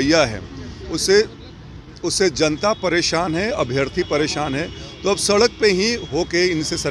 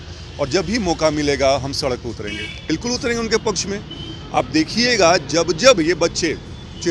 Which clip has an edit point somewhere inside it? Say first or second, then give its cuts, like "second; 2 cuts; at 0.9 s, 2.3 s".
second; 1 cut; at 2.5 s